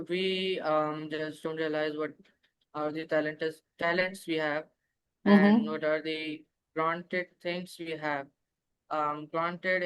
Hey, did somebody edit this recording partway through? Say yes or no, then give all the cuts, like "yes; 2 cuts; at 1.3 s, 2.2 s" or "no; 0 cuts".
no; 0 cuts